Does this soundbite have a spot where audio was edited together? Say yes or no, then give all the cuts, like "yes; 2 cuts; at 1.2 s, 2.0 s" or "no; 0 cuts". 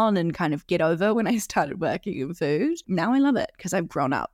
yes; 1 cut; at 2.9 s